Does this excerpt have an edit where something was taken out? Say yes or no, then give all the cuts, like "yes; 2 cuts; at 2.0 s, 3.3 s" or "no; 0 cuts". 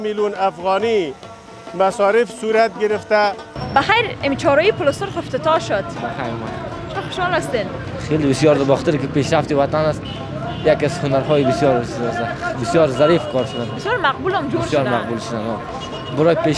yes; 1 cut; at 3.5 s